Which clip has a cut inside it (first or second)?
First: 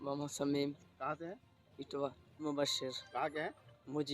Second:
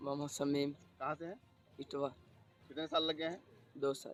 first